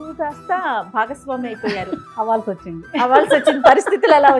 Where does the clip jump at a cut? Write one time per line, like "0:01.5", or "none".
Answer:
0:02.0